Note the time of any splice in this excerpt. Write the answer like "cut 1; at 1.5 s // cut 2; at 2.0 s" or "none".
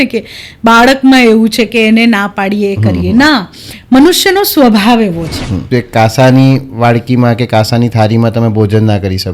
cut 1; at 5.7 s